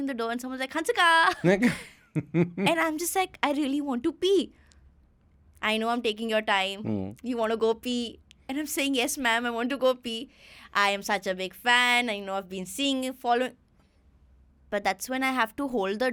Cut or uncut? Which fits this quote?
uncut